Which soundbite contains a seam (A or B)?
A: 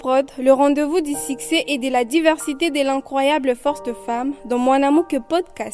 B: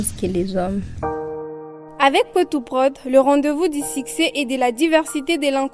B